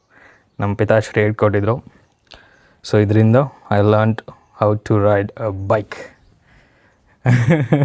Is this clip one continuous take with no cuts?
yes; 0 cuts

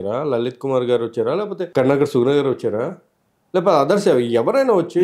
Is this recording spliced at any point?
yes; 1 cut; at 1.6 s

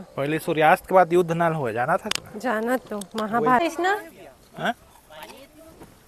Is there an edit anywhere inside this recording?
yes; 1 cut; at 3.6 s

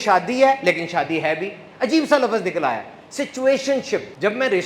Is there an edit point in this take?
no; 0 cuts

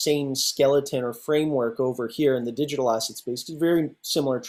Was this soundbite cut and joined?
no; 0 cuts

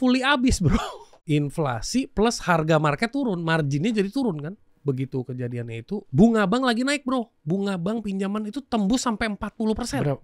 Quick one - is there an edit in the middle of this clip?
yes; 3 cuts; at 1.1 s, 4.7 s, 6.1 s

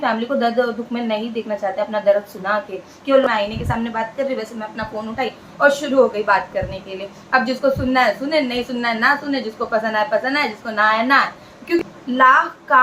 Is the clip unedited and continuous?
no; 2 cuts; at 3.2 s, 11.8 s

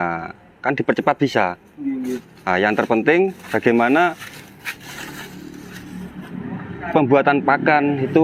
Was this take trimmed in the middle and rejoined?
no; 0 cuts

